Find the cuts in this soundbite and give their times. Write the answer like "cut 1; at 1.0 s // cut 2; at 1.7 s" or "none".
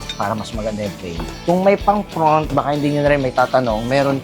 cut 1; at 1.3 s